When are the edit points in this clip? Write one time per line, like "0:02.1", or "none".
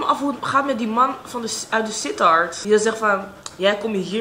0:02.6